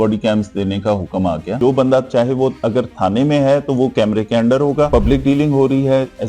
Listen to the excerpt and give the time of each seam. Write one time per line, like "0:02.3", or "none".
0:01.5
0:04.9